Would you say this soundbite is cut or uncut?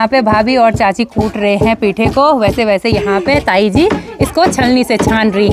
uncut